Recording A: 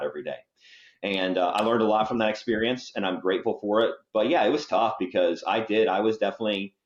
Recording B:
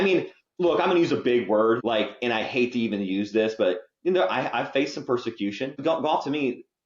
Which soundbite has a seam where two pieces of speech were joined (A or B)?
B